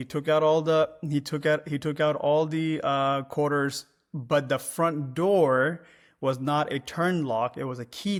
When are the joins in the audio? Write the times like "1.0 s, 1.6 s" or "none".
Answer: none